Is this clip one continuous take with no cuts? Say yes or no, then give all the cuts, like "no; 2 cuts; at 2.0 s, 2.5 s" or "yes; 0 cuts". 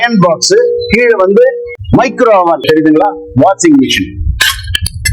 no; 1 cut; at 2.6 s